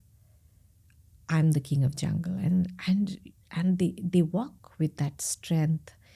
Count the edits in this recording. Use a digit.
0